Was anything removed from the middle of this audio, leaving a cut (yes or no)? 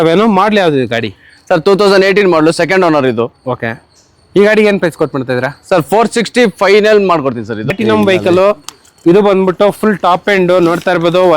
yes